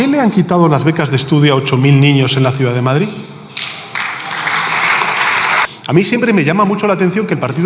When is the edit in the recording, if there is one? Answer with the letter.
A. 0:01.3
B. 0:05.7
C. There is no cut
B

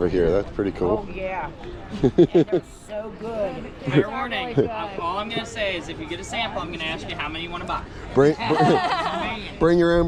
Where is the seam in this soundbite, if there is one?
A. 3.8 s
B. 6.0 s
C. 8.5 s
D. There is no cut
D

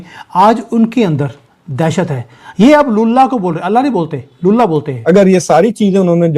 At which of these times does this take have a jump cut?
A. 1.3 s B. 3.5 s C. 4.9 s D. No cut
C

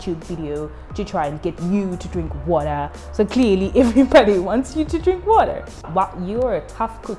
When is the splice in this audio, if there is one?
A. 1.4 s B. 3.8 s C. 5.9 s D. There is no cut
C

